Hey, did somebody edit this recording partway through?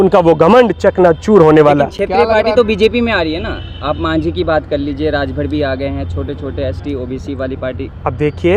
no; 0 cuts

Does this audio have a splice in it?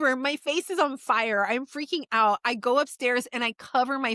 no; 0 cuts

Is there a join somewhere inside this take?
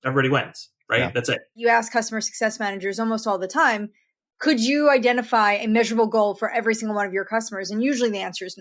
yes; 1 cut; at 1.5 s

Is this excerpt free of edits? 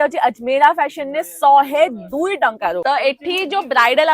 no; 1 cut; at 2.8 s

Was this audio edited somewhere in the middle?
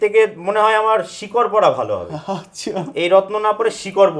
no; 0 cuts

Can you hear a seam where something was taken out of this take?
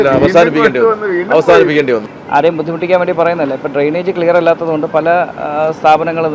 yes; 1 cut; at 2.1 s

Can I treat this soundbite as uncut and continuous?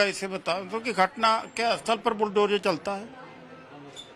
no; 1 cut; at 2.3 s

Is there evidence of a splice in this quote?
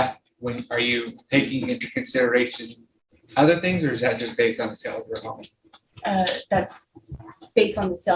no; 0 cuts

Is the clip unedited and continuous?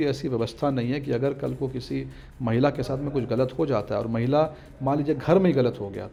yes; 0 cuts

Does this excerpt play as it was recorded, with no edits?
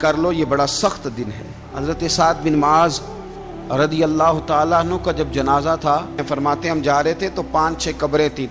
no; 2 cuts; at 1.7 s, 6.2 s

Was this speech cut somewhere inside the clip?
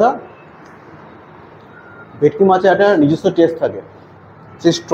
no; 0 cuts

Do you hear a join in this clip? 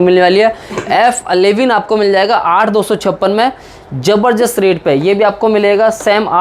no; 0 cuts

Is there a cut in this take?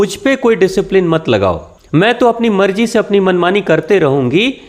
yes; 1 cut; at 1.7 s

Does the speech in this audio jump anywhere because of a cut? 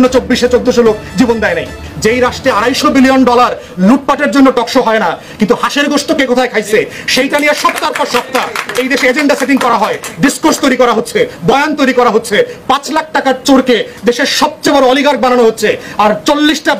no; 0 cuts

